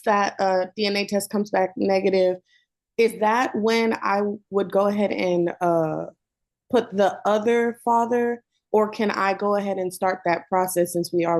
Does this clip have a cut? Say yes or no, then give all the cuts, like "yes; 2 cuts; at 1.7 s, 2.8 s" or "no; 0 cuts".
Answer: no; 0 cuts